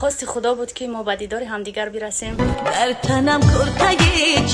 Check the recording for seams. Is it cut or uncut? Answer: cut